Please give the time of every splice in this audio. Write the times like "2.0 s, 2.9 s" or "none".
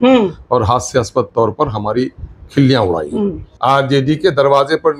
3.5 s